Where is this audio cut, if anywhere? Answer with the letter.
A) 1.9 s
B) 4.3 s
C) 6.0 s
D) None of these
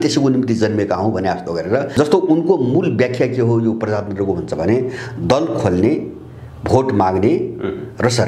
A